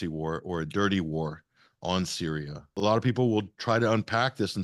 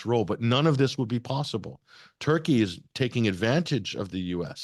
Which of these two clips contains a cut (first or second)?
first